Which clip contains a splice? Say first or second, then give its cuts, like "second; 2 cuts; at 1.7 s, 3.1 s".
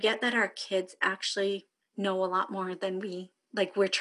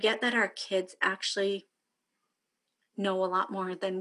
first; 1 cut; at 1.8 s